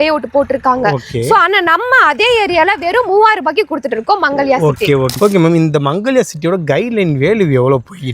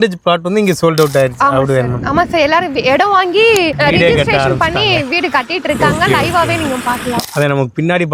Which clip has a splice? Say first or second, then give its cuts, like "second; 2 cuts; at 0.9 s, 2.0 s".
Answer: first; 1 cut; at 5.2 s